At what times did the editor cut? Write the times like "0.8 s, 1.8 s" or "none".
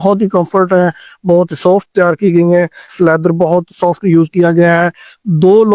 none